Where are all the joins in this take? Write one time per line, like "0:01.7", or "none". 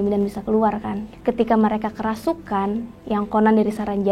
0:01.0